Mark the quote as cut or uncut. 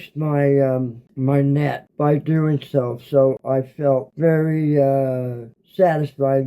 cut